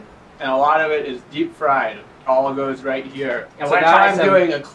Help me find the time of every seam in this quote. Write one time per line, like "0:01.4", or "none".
none

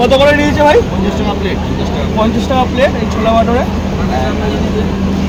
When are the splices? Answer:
none

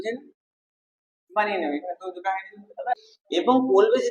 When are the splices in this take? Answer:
0:02.9

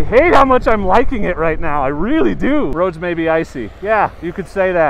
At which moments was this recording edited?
0:02.7

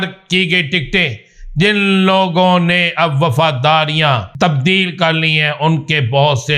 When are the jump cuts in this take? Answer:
0:04.3

